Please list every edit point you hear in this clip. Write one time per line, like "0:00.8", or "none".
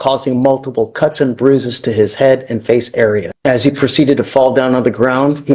0:03.3